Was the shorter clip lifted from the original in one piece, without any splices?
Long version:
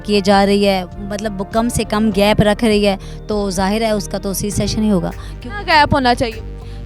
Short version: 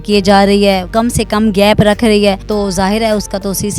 no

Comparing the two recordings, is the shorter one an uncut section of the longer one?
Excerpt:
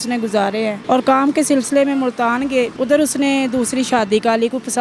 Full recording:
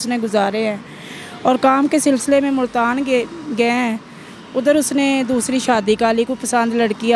no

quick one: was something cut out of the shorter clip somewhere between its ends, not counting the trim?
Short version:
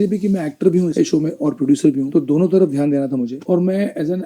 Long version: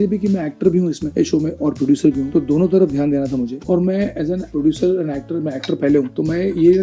yes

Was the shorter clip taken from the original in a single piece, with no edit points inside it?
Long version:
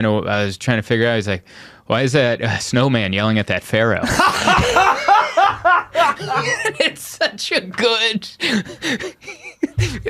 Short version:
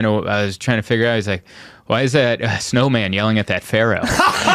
yes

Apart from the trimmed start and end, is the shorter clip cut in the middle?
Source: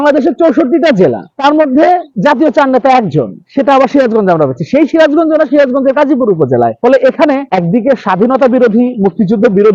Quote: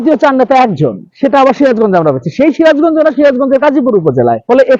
no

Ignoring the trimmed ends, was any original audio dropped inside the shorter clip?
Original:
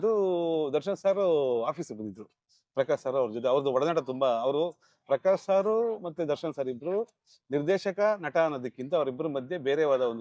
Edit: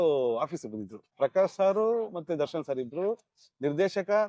yes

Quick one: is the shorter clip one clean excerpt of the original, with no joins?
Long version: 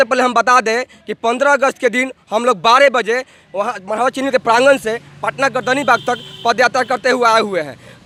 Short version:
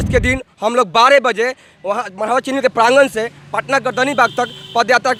yes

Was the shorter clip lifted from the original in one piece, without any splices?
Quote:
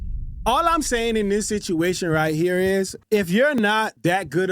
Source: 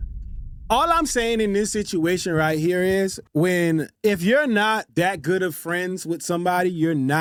no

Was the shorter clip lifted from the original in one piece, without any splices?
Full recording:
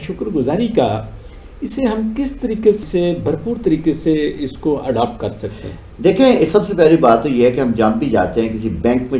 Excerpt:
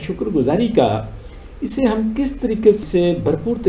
yes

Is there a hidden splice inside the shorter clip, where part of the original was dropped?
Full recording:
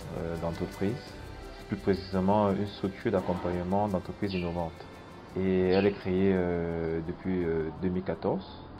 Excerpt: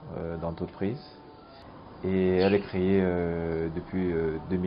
yes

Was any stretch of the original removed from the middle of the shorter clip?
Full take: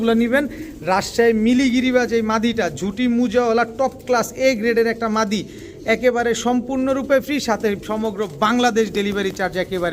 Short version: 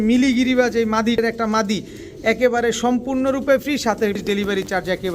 yes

